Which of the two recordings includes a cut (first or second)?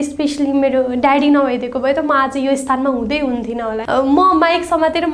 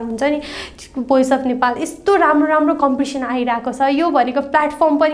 first